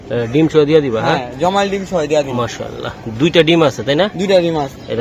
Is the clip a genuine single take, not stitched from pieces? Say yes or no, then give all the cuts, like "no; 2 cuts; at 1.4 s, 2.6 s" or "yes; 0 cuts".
yes; 0 cuts